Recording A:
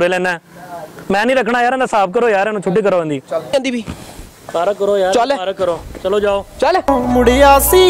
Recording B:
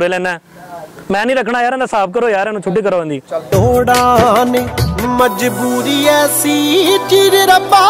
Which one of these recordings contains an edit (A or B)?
A